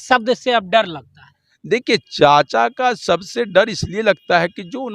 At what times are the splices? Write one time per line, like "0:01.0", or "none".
none